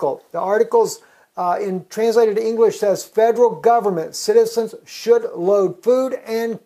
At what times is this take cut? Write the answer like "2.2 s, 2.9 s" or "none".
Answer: 3.5 s